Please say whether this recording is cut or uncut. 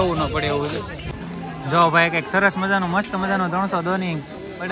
cut